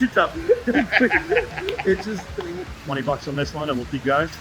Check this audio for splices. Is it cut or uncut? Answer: cut